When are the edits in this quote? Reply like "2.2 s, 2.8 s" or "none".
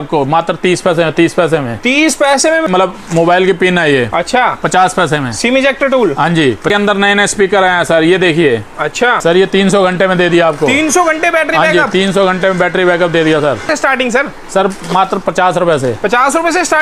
2.6 s, 6.7 s, 9.2 s, 13.7 s